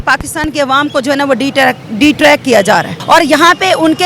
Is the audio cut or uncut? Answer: cut